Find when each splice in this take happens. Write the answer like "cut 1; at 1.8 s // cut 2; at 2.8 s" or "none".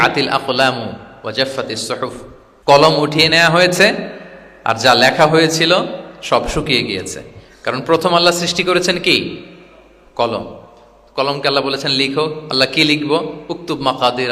cut 1; at 2.7 s

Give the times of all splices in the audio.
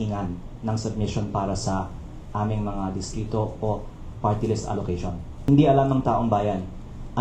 cut 1; at 5.3 s

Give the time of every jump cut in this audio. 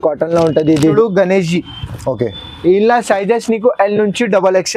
cut 1; at 0.9 s

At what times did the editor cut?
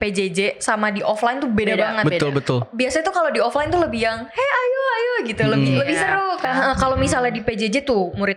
cut 1; at 6.4 s

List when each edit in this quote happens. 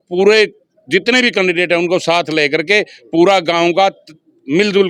none

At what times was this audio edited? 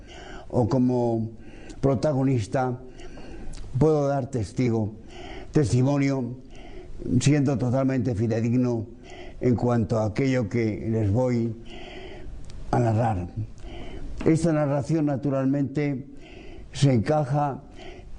cut 1; at 2.1 s

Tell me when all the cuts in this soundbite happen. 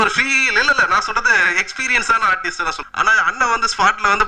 cut 1; at 2.8 s

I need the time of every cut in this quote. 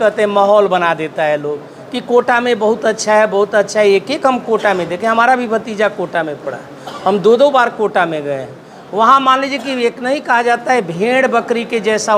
none

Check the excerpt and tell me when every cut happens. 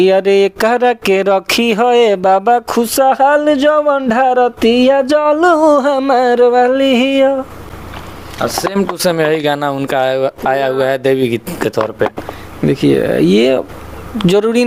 none

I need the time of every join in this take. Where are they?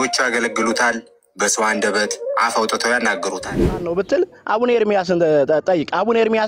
cut 1; at 3.8 s

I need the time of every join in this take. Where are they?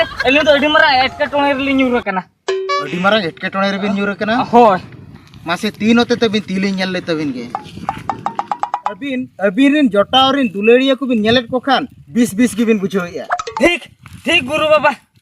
cut 1; at 7.6 s // cut 2; at 9.3 s

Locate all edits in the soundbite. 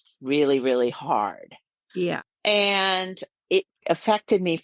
cut 1; at 1.7 s // cut 2; at 3.8 s

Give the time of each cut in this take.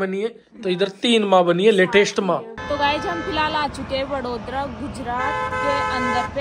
cut 1; at 2.5 s

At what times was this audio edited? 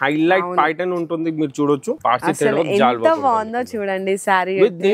cut 1; at 1.9 s

